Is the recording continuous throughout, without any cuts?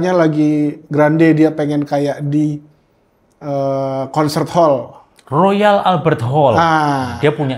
yes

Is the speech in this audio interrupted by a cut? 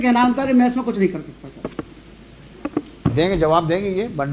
no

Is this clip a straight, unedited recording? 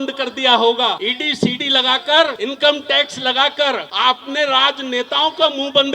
no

